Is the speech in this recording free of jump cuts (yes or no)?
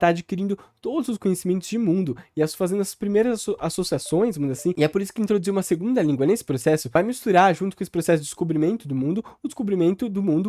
no